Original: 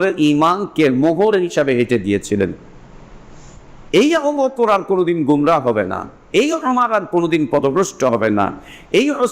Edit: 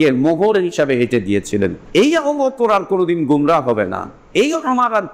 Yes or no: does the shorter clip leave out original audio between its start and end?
yes